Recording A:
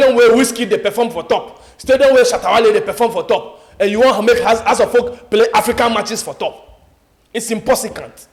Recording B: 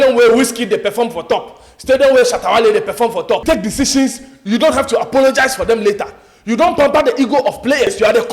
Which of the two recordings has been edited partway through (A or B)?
B